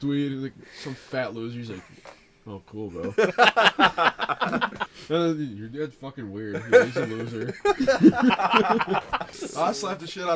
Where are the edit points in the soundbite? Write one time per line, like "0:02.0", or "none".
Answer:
0:04.8
0:09.4